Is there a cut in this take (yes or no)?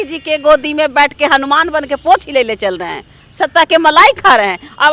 no